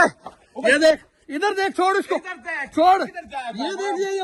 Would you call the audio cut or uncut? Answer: uncut